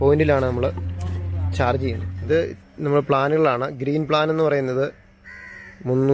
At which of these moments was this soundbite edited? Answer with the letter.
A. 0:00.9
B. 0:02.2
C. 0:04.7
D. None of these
B